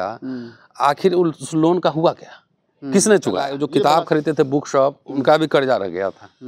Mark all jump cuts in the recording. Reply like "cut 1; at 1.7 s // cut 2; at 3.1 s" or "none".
cut 1; at 3.5 s